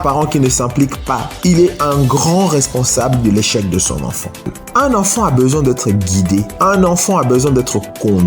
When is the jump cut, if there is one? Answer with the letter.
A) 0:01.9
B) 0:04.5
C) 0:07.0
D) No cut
B